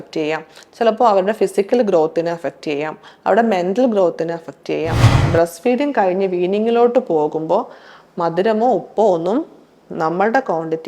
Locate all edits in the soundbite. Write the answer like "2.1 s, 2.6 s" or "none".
5.2 s